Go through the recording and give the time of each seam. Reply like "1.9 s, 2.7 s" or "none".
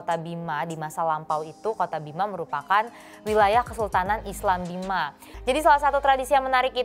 5.0 s